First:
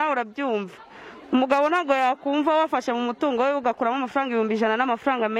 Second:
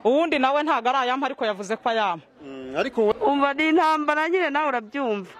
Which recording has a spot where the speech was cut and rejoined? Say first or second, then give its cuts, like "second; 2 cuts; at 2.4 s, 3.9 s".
second; 1 cut; at 3.1 s